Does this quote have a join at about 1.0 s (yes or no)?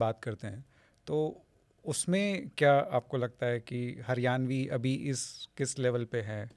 no